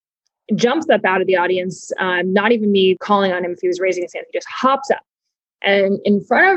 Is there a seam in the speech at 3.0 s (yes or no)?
yes